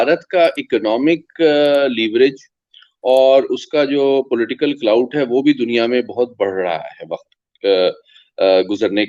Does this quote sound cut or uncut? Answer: uncut